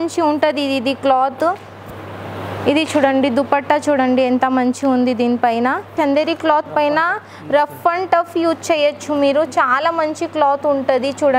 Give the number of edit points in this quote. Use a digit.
1